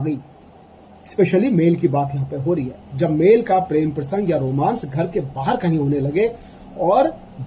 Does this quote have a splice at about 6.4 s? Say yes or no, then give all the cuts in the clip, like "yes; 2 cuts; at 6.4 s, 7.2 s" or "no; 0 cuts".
no; 0 cuts